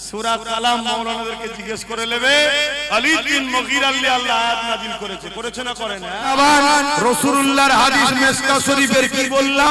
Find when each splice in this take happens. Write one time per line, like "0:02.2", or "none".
0:06.3